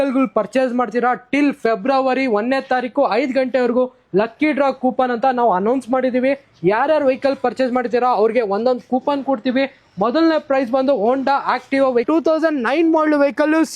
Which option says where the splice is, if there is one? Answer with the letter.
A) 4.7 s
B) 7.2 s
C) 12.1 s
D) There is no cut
C